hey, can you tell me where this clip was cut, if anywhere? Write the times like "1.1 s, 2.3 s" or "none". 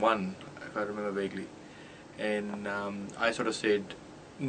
2.0 s